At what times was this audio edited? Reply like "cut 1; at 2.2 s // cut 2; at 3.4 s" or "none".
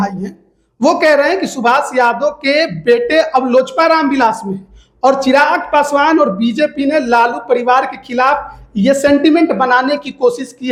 none